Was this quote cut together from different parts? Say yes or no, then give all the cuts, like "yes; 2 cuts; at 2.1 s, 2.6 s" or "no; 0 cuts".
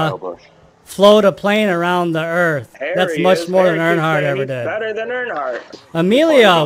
yes; 1 cut; at 5.7 s